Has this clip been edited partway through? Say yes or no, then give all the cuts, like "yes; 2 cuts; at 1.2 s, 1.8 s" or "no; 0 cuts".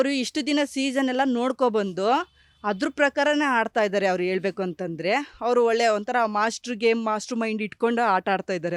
no; 0 cuts